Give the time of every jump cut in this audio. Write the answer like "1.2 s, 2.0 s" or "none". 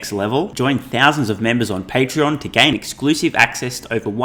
none